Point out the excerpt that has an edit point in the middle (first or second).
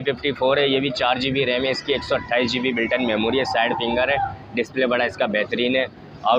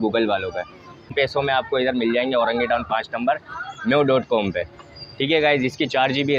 second